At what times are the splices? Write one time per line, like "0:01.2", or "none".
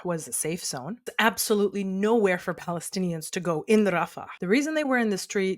0:01.1
0:04.3